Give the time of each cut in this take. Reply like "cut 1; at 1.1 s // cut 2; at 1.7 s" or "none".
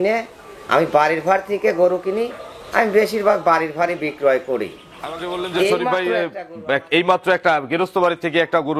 cut 1; at 6.0 s